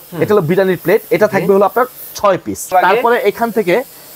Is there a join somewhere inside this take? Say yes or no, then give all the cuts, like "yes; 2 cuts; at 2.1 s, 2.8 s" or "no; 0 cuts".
yes; 1 cut; at 2.7 s